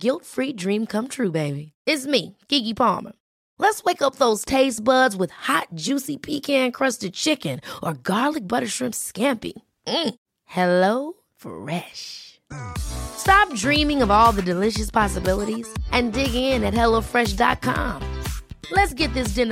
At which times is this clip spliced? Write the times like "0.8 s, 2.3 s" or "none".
none